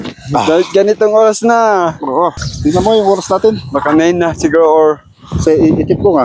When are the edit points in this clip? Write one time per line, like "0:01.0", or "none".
0:02.3